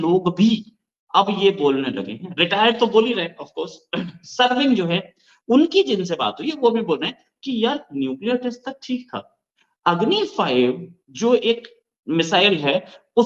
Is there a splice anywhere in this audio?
no; 0 cuts

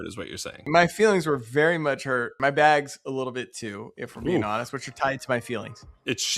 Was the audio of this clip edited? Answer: yes; 1 cut; at 2.3 s

